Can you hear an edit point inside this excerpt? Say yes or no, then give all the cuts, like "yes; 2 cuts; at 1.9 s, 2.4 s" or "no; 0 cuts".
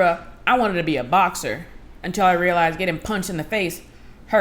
no; 0 cuts